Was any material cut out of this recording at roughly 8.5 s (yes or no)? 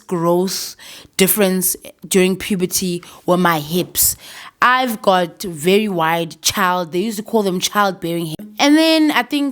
yes